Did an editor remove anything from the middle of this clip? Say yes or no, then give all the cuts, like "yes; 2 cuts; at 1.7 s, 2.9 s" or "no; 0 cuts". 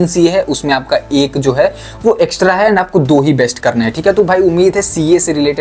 no; 0 cuts